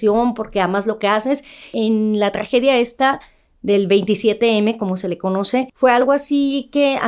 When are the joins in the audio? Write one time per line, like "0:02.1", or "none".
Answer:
0:01.7
0:05.7